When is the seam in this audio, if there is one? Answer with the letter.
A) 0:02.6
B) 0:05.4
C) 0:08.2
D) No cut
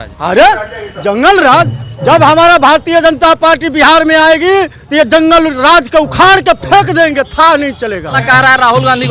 C